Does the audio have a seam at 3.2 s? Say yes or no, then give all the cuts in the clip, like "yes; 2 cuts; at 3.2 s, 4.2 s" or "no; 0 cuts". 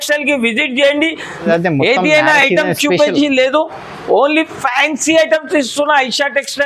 no; 1 cut; at 1.4 s